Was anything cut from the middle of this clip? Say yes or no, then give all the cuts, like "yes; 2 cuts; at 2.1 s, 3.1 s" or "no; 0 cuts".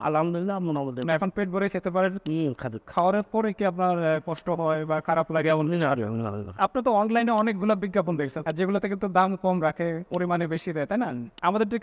yes; 2 cuts; at 6.5 s, 8.4 s